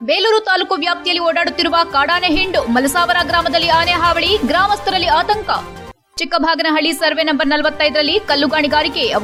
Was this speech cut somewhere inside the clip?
no; 0 cuts

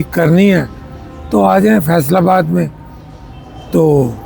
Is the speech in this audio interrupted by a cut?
no; 0 cuts

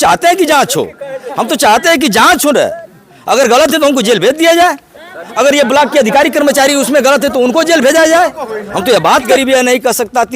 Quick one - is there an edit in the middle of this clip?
yes; 1 cut; at 9.3 s

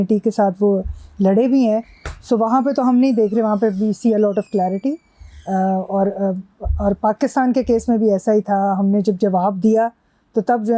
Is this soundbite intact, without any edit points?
yes; 0 cuts

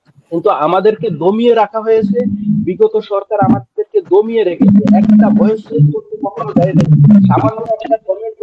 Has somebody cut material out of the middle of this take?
no; 0 cuts

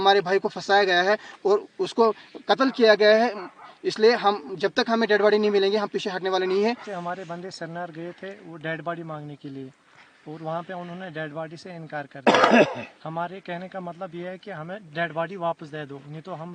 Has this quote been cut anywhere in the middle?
no; 0 cuts

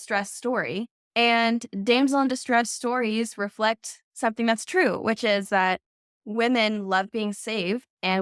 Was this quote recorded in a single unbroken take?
no; 2 cuts; at 1.0 s, 6.1 s

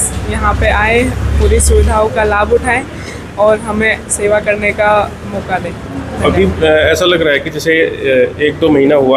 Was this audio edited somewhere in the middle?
no; 0 cuts

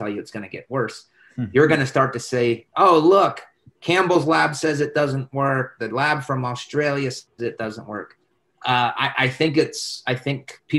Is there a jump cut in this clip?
yes; 1 cut; at 7.3 s

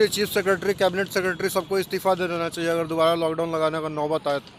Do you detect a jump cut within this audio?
no; 0 cuts

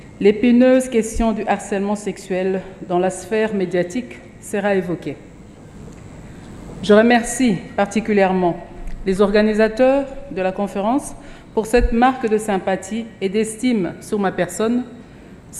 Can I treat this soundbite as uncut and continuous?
yes; 0 cuts

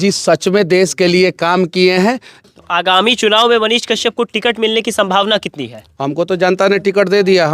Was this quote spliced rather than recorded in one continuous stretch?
yes; 1 cut; at 2.3 s

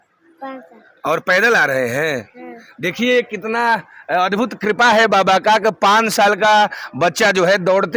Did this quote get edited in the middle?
no; 0 cuts

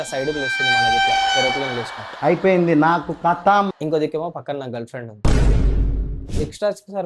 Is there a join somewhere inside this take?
yes; 1 cut; at 6.1 s

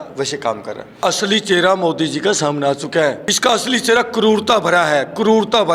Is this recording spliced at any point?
yes; 2 cuts; at 1.0 s, 3.3 s

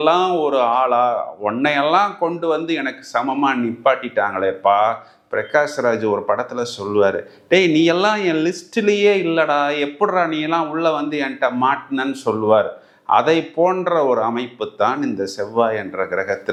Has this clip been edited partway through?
no; 0 cuts

